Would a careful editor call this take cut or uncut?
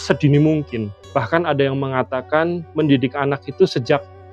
uncut